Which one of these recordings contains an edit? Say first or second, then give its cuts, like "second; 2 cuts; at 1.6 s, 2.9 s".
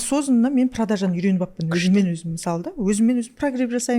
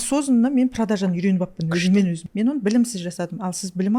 second; 1 cut; at 2.2 s